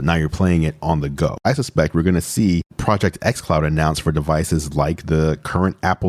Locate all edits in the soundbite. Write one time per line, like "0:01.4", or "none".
0:01.4